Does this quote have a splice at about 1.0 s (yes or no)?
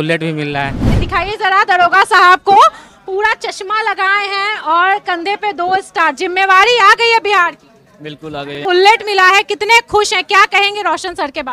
yes